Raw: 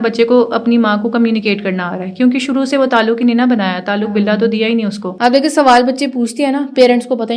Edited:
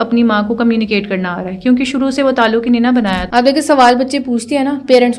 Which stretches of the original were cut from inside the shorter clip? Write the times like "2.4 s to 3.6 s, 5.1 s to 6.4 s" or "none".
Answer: 3.8 s to 5.1 s